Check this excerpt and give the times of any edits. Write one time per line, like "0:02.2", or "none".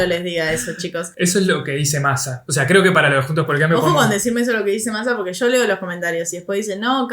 0:01.0
0:02.4